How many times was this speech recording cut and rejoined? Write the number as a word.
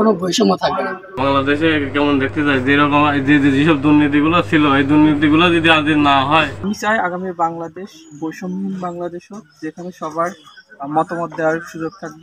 two